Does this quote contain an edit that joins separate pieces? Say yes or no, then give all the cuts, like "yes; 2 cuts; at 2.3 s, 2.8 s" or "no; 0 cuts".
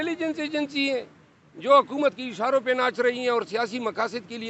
no; 0 cuts